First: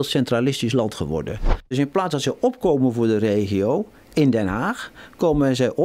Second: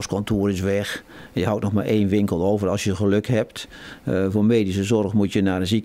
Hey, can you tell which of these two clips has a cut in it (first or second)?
first